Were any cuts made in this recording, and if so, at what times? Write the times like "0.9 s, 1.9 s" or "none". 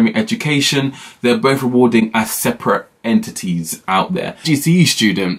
4.5 s